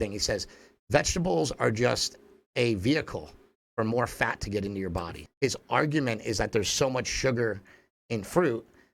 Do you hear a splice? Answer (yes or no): yes